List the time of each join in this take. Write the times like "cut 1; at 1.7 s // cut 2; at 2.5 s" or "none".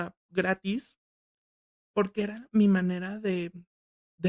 none